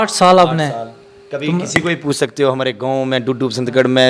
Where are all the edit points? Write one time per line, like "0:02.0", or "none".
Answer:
none